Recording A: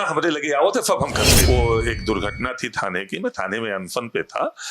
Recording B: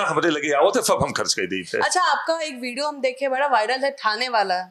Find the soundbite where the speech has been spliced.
A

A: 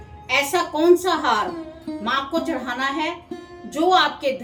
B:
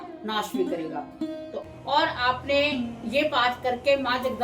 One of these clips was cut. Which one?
B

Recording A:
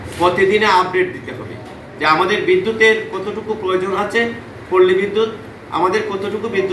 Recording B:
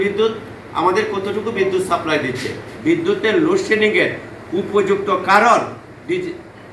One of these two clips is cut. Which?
B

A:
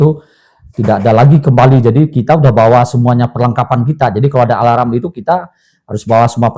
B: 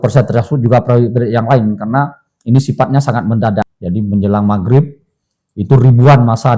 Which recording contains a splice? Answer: B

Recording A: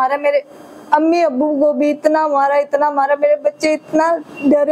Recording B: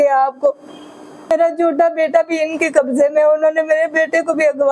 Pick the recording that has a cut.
B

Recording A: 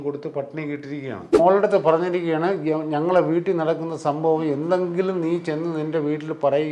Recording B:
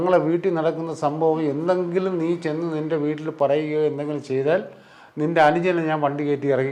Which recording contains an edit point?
A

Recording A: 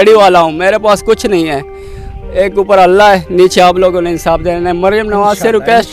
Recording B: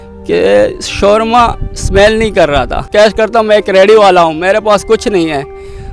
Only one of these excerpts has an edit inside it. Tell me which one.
B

